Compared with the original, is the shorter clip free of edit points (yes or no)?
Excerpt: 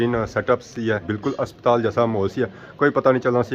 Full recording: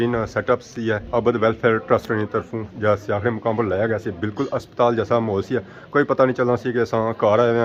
no